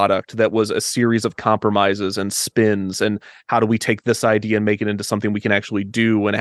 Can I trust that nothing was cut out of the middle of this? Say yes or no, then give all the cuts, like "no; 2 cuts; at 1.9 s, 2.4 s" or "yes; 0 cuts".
yes; 0 cuts